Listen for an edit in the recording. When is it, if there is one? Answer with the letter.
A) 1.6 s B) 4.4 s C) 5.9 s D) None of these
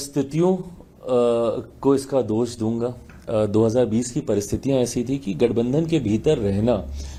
D